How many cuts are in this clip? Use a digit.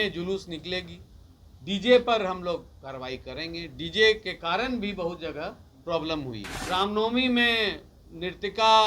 1